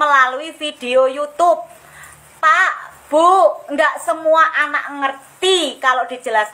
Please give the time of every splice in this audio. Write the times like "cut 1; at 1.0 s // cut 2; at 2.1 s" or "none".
cut 1; at 1.8 s